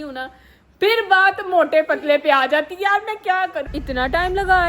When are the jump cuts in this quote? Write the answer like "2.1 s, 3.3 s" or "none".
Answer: 3.7 s